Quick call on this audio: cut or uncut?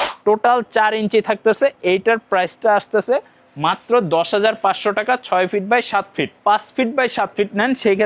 cut